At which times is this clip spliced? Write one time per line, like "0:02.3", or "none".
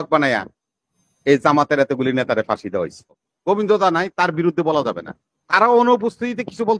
0:03.2